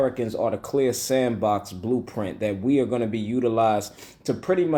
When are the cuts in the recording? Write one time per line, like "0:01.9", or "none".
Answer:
none